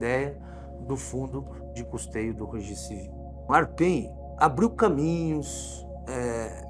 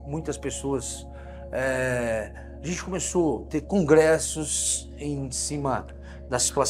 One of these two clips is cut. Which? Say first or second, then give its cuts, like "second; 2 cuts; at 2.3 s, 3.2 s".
first; 1 cut; at 3.3 s